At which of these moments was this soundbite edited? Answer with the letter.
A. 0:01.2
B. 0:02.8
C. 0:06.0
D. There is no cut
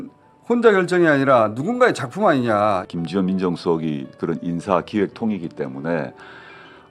B